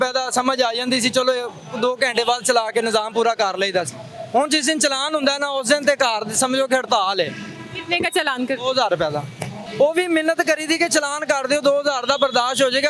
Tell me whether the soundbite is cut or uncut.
uncut